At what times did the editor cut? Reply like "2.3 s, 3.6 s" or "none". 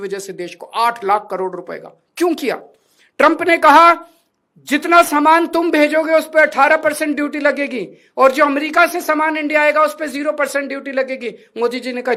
none